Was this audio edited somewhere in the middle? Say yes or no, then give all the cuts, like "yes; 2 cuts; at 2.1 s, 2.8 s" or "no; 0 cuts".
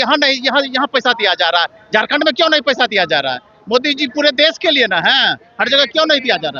no; 0 cuts